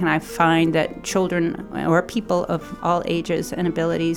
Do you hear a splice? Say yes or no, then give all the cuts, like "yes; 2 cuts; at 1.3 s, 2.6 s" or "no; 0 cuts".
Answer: no; 0 cuts